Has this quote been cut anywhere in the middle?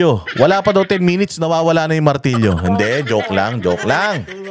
no; 0 cuts

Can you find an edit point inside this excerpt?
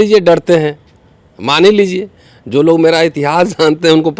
no; 0 cuts

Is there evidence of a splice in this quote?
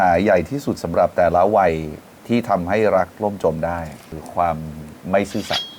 no; 0 cuts

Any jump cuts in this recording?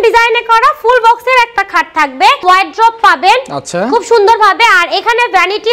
yes; 1 cut; at 2.4 s

